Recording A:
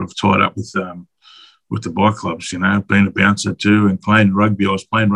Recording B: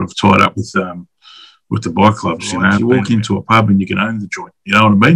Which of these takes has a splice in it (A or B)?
B